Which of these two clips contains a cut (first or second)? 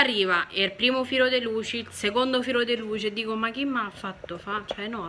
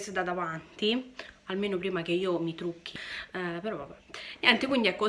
second